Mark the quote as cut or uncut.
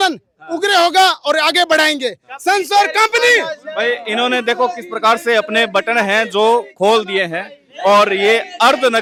uncut